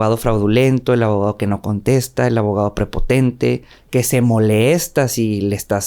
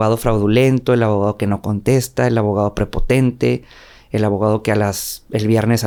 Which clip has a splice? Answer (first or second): first